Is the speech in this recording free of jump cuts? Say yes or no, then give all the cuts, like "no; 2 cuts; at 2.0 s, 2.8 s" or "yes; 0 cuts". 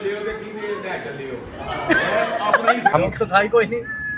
no; 1 cut; at 2.9 s